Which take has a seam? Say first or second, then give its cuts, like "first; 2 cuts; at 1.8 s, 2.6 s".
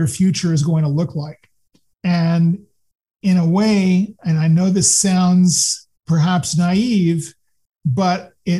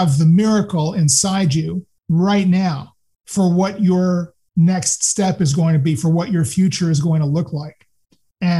second; 1 cut; at 1.9 s